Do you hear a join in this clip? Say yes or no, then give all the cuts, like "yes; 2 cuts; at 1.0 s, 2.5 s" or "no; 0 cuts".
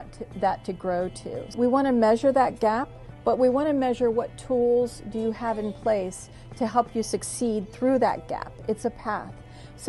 yes; 1 cut; at 1.5 s